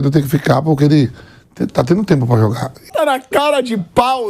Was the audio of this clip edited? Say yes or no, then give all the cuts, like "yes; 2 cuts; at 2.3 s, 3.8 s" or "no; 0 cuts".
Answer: yes; 1 cut; at 2.9 s